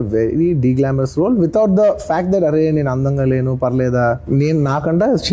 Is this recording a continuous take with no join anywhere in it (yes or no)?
no